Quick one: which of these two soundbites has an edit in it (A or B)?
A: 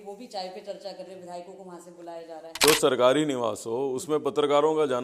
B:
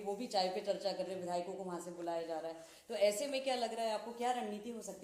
A